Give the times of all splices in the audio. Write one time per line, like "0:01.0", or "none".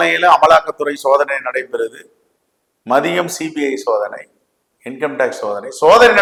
none